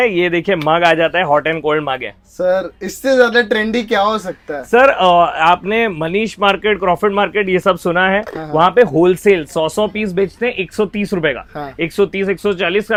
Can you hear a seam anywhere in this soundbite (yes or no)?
no